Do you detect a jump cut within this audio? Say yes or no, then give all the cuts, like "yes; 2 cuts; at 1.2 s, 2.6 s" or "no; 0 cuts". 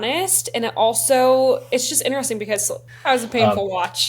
yes; 1 cut; at 2.8 s